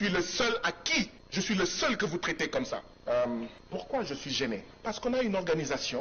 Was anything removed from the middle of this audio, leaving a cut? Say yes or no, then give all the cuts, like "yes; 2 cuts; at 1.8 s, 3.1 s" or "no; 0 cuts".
yes; 4 cuts; at 1.2 s, 2.9 s, 3.6 s, 4.7 s